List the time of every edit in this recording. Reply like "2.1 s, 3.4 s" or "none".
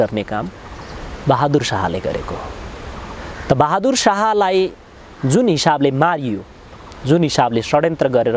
none